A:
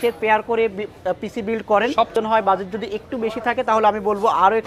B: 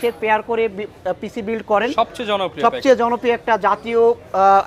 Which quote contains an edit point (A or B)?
A